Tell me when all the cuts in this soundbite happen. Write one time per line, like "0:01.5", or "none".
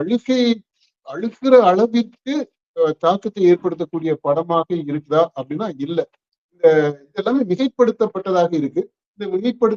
none